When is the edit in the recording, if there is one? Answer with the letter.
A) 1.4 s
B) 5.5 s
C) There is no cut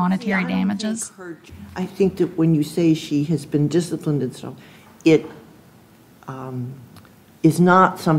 A